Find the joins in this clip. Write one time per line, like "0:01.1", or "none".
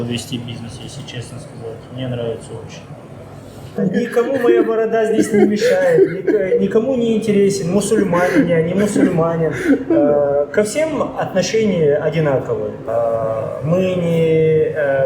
0:03.8
0:12.8